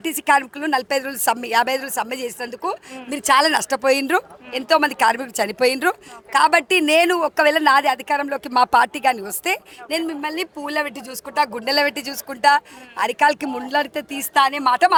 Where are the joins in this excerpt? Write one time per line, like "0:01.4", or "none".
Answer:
none